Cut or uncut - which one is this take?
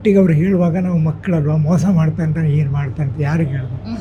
uncut